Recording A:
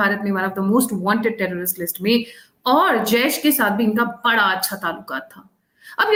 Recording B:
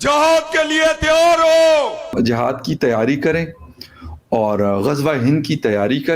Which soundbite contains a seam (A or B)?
B